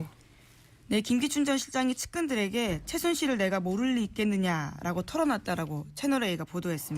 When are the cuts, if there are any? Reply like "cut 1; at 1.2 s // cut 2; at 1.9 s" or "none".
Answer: cut 1; at 2.7 s